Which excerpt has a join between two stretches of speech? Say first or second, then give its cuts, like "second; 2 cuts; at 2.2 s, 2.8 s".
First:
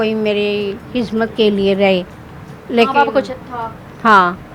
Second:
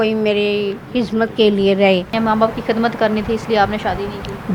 second; 1 cut; at 2.1 s